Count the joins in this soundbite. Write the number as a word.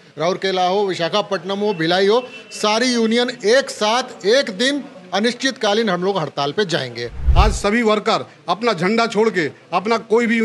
one